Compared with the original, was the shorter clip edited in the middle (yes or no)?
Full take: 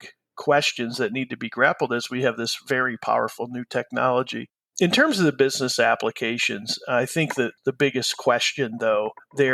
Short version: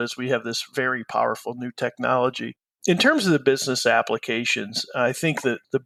no